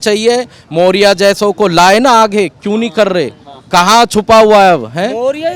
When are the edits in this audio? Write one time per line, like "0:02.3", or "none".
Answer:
none